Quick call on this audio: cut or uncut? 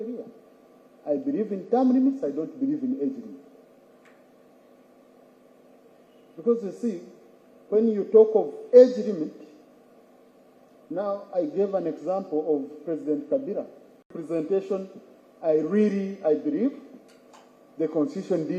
cut